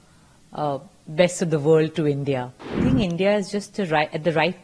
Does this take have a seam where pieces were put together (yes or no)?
yes